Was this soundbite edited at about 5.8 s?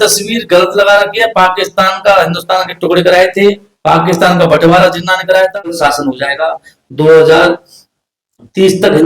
yes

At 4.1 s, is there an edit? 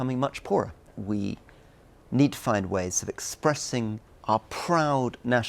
yes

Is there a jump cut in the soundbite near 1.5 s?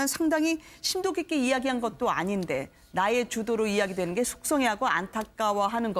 yes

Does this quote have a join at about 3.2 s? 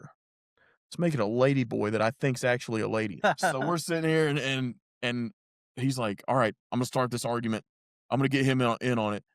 yes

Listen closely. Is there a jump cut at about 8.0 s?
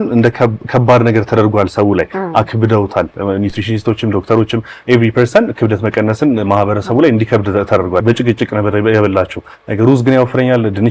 yes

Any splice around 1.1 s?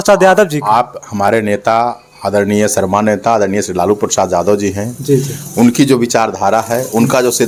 no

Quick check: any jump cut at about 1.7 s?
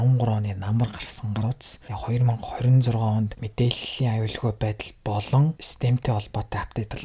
yes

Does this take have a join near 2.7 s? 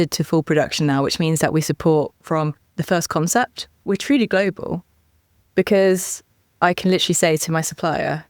yes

